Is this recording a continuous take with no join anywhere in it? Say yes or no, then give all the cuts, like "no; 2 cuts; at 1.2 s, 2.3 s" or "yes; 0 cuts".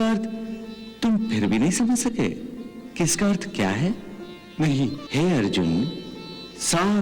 no; 1 cut; at 5.0 s